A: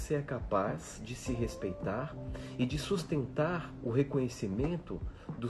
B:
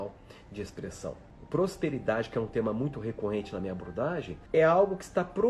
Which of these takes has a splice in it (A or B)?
B